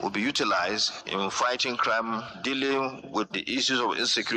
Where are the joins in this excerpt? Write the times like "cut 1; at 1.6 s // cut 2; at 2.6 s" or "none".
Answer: cut 1; at 0.9 s